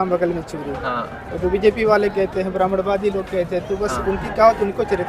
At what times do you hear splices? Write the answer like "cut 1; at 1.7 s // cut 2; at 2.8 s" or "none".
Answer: none